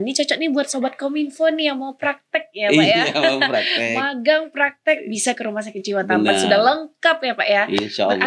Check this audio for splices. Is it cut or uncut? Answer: uncut